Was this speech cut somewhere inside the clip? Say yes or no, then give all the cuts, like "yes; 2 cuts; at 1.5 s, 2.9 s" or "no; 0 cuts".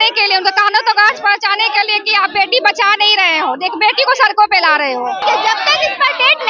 yes; 1 cut; at 5.2 s